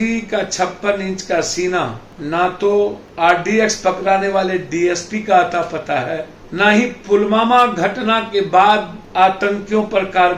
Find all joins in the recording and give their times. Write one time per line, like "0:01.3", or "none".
0:02.1
0:03.0
0:06.4
0:09.0